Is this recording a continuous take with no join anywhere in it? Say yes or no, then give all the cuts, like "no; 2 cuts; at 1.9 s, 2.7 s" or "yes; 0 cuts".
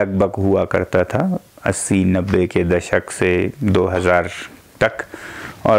yes; 0 cuts